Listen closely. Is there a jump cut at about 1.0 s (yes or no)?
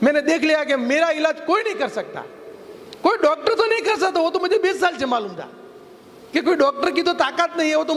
no